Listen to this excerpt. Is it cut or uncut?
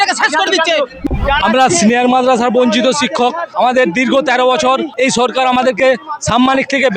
cut